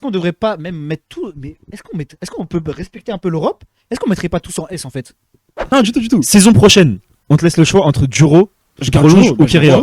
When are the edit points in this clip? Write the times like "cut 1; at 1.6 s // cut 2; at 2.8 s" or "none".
cut 1; at 5.7 s